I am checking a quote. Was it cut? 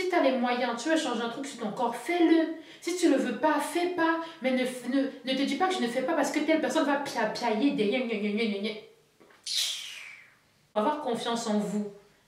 yes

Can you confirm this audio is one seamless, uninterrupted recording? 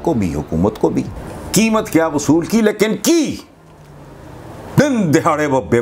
no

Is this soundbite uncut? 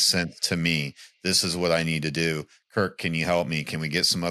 yes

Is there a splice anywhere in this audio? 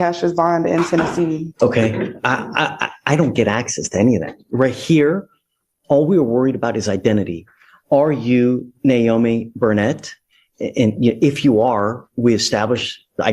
yes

